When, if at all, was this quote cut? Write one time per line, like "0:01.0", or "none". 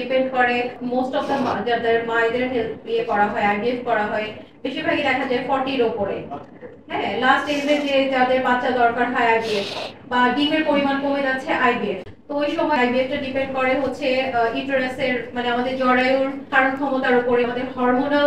none